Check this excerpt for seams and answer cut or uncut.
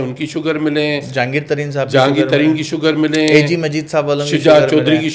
uncut